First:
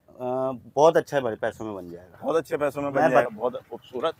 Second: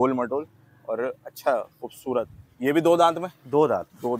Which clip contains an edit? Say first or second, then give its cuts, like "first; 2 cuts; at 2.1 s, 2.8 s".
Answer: first; 1 cut; at 3.2 s